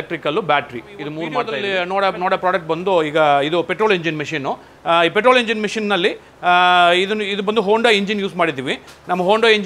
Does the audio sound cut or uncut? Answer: cut